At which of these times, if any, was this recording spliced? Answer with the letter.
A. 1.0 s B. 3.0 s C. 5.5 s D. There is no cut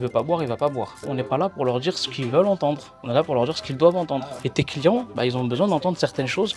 A